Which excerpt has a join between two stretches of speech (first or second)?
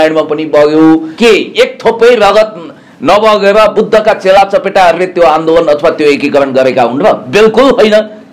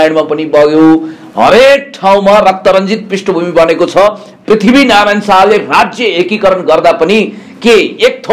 first